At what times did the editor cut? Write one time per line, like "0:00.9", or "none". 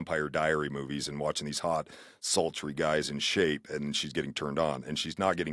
none